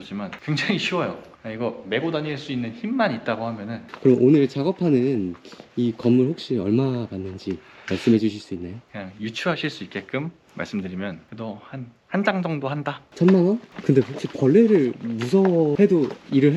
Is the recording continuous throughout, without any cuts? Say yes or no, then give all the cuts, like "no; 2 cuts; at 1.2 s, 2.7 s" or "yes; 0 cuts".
no; 3 cuts; at 3.9 s, 8.9 s, 13.7 s